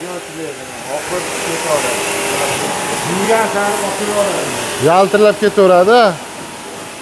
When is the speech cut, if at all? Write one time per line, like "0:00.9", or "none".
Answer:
0:02.6